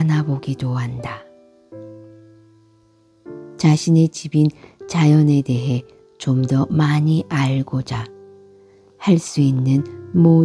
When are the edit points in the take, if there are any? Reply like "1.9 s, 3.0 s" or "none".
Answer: none